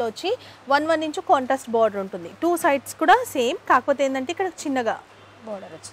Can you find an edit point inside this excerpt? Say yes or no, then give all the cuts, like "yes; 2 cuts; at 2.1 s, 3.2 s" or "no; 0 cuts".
no; 0 cuts